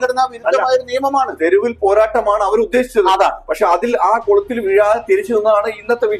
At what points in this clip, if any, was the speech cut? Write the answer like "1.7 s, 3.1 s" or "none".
none